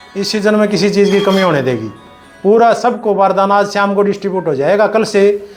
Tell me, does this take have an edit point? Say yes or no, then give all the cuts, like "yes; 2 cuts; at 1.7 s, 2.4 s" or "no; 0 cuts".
no; 0 cuts